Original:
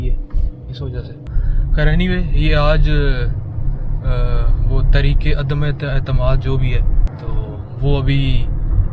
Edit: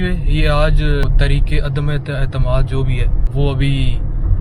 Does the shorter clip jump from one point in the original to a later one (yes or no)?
yes